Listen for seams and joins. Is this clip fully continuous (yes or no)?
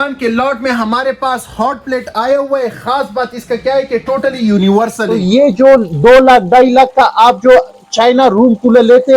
no